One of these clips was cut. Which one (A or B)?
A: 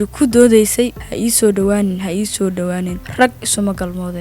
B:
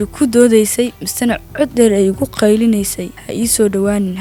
A